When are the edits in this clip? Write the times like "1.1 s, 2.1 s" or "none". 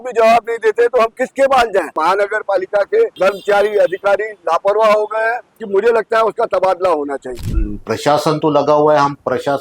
2.0 s, 3.1 s, 5.5 s, 7.3 s